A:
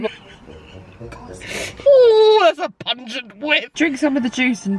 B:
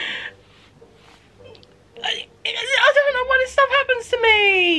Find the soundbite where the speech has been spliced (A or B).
A